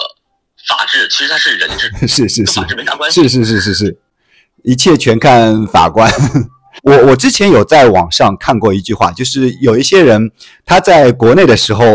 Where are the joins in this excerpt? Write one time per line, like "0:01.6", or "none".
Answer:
none